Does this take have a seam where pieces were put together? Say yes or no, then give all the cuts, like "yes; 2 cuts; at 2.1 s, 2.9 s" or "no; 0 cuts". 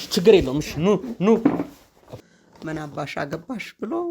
yes; 1 cut; at 2.0 s